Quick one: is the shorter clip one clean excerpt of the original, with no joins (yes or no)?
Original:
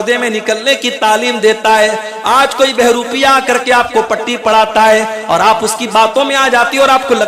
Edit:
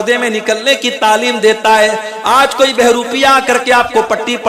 yes